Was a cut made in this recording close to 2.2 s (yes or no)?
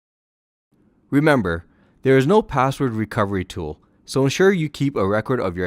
yes